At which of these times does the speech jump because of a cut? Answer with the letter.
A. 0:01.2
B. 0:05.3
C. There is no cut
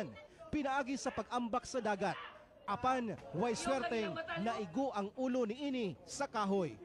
B